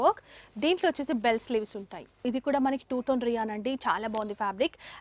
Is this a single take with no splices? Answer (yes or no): no